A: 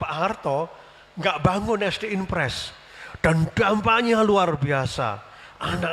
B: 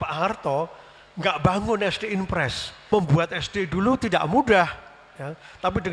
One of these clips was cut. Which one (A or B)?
B